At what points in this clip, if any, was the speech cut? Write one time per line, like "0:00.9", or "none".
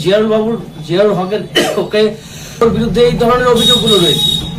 0:02.6

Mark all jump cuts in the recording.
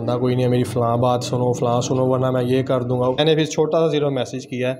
0:03.2

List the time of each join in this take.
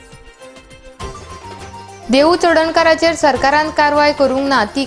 none

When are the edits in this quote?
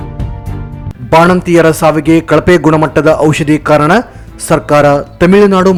none

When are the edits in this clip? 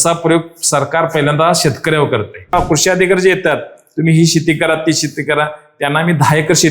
0:02.6

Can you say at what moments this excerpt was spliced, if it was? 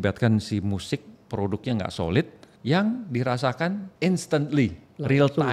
0:02.4
0:03.9

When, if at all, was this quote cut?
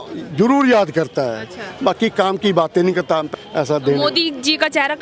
0:03.3

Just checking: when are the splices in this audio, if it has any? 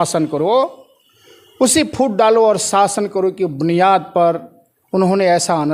none

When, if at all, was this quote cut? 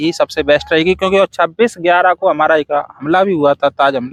none

